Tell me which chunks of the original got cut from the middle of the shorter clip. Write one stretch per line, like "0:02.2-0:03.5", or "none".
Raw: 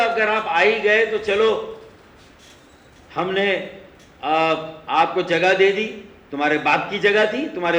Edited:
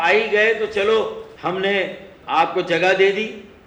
0:01.8-0:03.0
0:03.9-0:04.7